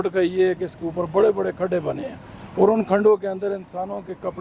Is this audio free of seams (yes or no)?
yes